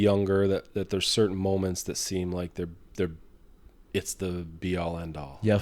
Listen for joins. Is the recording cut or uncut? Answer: uncut